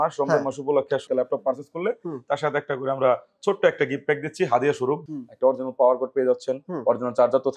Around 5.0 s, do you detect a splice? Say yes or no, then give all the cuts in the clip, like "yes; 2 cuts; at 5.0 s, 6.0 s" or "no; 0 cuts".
yes; 2 cuts; at 1.0 s, 5.0 s